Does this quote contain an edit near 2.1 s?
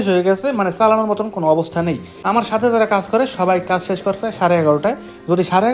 yes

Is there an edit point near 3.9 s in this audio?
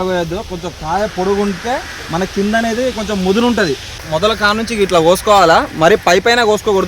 yes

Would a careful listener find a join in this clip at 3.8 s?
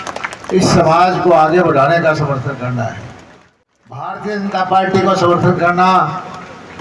no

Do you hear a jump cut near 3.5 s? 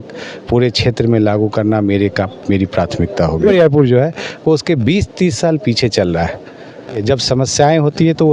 yes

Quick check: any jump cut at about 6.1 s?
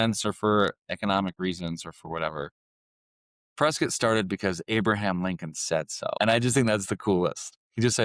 yes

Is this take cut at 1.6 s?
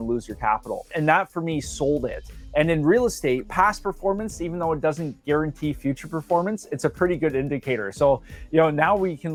no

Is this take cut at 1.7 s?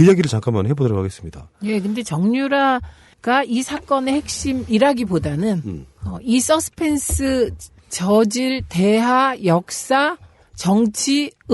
yes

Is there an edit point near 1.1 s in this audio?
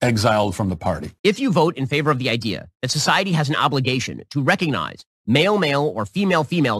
yes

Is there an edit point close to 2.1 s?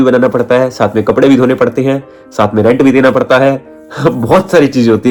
no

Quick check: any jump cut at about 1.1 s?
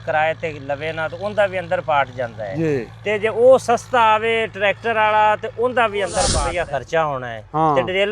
no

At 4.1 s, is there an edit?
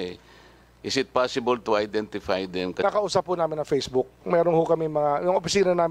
no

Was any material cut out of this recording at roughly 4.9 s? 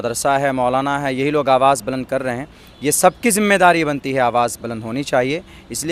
no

